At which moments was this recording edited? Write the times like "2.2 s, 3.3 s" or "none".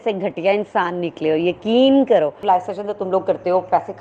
2.4 s